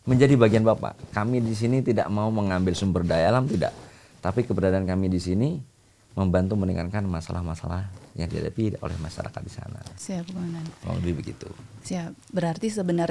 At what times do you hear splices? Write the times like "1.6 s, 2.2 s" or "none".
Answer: none